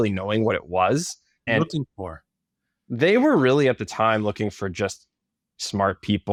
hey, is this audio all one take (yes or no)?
yes